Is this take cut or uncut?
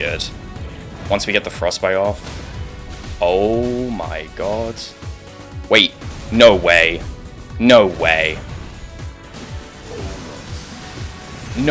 uncut